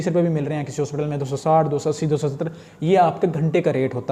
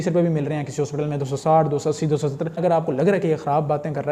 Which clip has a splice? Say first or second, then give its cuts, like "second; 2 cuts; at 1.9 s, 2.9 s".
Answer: second; 1 cut; at 2.6 s